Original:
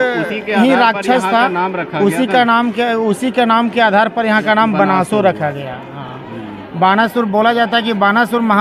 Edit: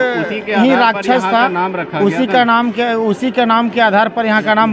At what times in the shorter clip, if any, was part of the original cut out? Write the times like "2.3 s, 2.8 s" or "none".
none